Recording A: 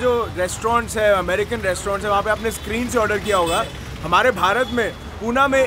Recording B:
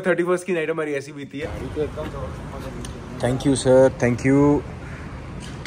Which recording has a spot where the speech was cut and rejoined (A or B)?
B